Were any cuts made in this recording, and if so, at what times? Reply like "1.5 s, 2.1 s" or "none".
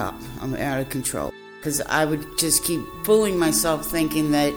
1.6 s, 2.9 s